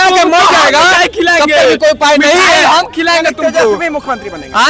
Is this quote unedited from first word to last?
yes; 0 cuts

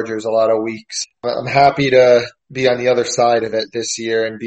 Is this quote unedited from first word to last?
no; 2 cuts; at 1.1 s, 2.4 s

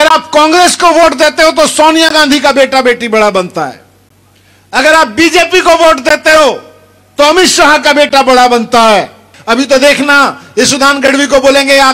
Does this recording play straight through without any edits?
no; 1 cut; at 9.3 s

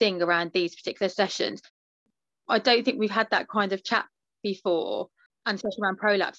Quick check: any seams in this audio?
yes; 2 cuts; at 2.0 s, 5.4 s

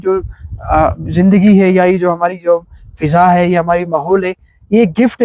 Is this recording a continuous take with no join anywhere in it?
yes; 0 cuts

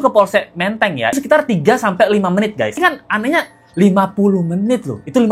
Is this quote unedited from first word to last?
no; 2 cuts; at 1.2 s, 2.8 s

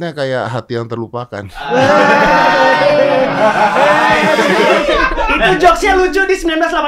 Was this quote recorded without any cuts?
yes; 0 cuts

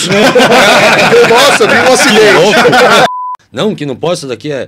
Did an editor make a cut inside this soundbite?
yes; 1 cut; at 3.1 s

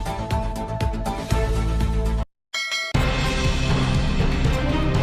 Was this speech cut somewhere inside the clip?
no; 0 cuts

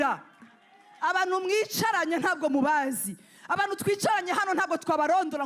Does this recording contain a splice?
no; 0 cuts

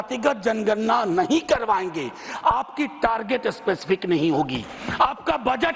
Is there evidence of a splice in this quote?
no; 0 cuts

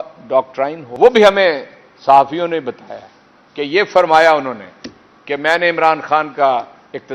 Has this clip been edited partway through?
yes; 1 cut; at 1.0 s

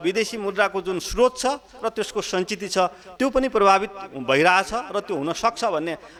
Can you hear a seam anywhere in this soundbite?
no; 0 cuts

